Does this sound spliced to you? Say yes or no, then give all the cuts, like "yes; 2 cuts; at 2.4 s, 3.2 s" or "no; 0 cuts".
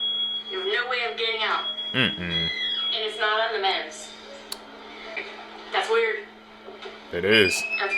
yes; 1 cut; at 5.2 s